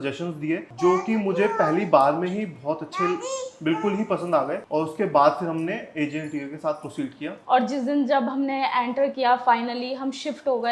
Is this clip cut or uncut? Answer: cut